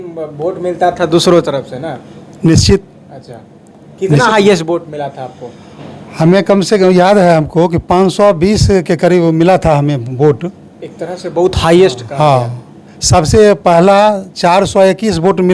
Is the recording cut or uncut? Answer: uncut